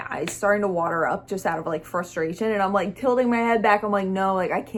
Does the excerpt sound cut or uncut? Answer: uncut